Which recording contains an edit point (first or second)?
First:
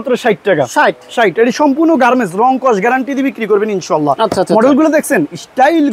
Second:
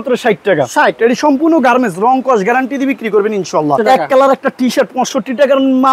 second